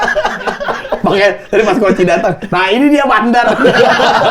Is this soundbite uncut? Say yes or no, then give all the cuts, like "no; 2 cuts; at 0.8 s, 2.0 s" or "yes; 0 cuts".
yes; 0 cuts